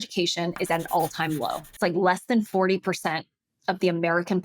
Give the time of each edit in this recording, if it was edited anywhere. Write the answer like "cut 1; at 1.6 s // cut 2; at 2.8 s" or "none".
cut 1; at 1.7 s